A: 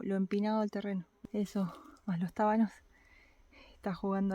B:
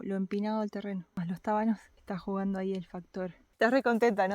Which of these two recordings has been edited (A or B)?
B